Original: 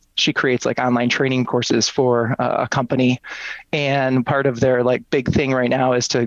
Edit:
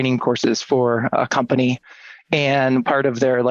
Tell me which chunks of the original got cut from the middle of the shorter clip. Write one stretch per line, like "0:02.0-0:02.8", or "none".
0:02.4-0:02.5